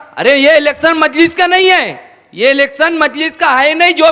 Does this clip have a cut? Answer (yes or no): no